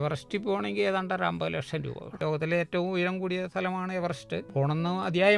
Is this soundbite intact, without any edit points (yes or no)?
no